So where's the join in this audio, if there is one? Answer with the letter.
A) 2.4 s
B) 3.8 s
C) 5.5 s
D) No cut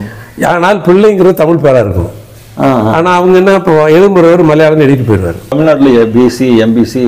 C